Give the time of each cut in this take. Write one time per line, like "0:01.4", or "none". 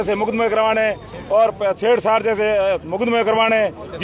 none